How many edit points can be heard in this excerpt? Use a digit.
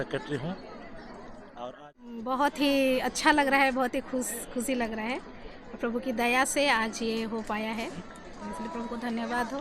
1